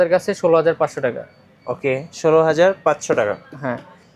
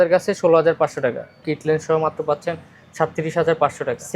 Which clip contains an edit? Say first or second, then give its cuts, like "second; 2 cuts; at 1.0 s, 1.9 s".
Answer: second; 1 cut; at 1.5 s